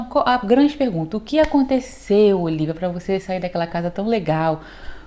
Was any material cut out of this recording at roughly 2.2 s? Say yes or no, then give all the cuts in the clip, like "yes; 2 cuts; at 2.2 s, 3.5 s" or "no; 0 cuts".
no; 0 cuts